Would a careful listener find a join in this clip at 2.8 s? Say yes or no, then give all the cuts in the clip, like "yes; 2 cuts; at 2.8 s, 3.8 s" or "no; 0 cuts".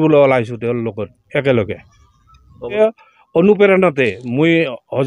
yes; 1 cut; at 2.8 s